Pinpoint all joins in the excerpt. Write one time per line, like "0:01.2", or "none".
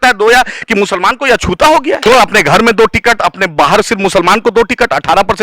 0:02.0